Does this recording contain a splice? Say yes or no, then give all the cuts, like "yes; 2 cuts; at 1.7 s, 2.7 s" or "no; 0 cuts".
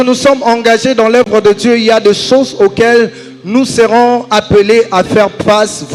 no; 0 cuts